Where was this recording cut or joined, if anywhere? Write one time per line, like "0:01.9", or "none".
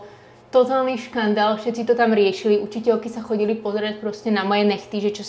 none